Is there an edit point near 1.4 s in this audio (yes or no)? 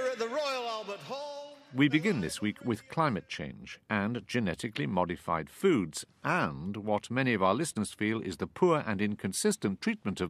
no